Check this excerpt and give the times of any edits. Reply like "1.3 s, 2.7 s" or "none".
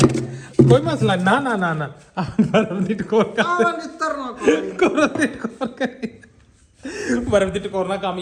none